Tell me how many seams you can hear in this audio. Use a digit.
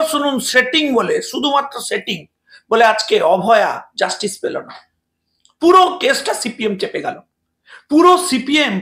0